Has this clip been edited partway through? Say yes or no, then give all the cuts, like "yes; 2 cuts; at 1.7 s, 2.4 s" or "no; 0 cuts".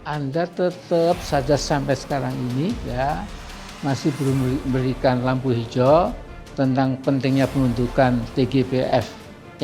no; 0 cuts